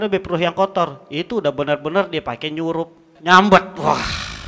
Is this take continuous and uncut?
no; 1 cut; at 3.1 s

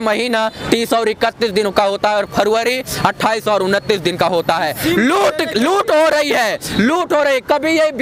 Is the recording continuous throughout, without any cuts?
yes; 0 cuts

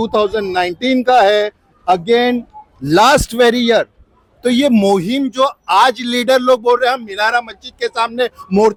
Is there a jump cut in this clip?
no; 0 cuts

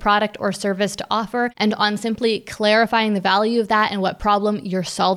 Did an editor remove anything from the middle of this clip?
yes; 1 cut; at 1.5 s

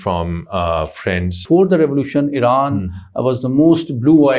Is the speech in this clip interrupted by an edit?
yes; 1 cut; at 1.4 s

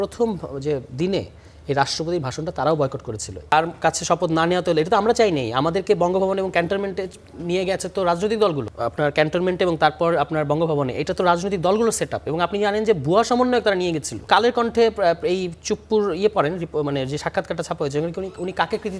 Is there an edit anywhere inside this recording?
yes; 3 cuts; at 3.5 s, 8.7 s, 14.2 s

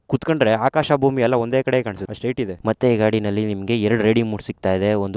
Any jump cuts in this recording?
yes; 1 cut; at 2.5 s

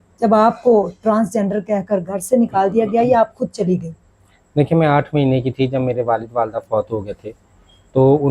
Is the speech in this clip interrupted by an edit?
no; 0 cuts

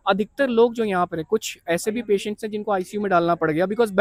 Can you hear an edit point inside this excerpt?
no; 0 cuts

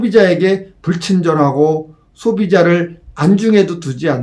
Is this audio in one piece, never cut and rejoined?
yes; 0 cuts

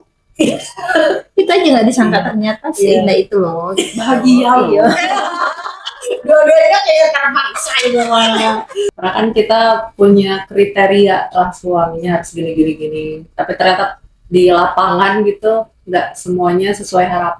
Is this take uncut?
no; 1 cut; at 8.9 s

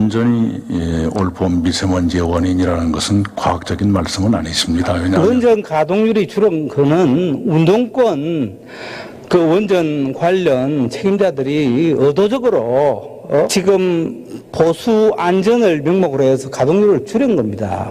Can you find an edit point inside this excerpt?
yes; 2 cuts; at 5.1 s, 13.5 s

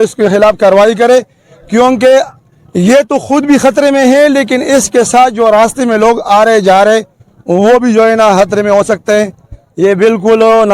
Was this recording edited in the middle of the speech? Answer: no; 0 cuts

